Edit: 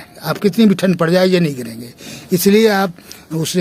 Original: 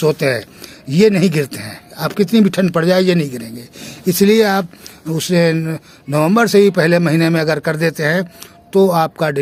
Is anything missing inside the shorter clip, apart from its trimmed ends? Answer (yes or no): no